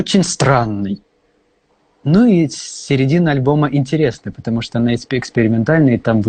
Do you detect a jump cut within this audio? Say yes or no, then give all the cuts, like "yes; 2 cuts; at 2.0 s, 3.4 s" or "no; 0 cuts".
no; 0 cuts